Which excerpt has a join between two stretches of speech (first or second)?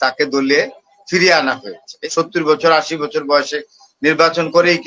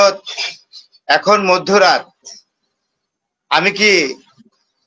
first